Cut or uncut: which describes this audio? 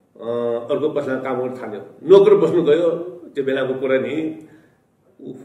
uncut